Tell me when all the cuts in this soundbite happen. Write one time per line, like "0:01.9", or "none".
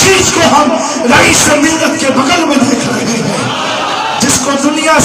none